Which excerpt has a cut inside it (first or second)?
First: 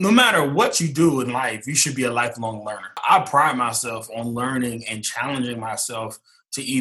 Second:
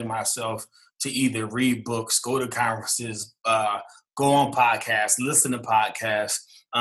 first